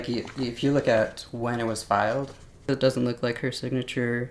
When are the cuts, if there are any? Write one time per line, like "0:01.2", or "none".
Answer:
0:02.5